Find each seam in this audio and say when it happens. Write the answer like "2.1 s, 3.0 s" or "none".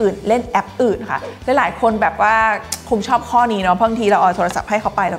none